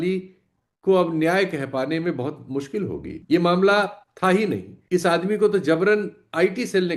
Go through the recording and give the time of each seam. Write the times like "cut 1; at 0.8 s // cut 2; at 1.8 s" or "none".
cut 1; at 3.1 s // cut 2; at 4.7 s